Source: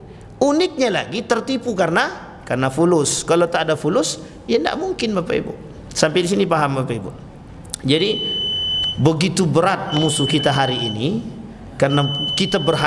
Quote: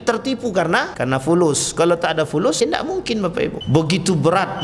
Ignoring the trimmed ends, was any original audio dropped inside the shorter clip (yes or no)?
yes